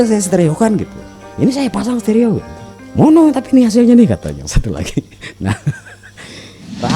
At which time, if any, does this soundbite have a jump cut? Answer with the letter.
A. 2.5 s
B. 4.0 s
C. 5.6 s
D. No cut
D